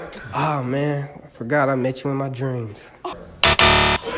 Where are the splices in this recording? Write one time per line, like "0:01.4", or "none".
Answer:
0:03.1